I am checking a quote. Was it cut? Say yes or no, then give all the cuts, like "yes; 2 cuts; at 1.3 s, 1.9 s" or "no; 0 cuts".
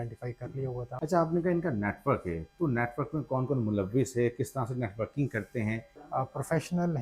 yes; 2 cuts; at 0.9 s, 5.9 s